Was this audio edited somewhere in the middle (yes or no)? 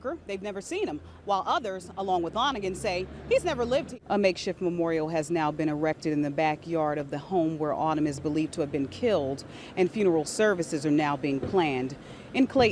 yes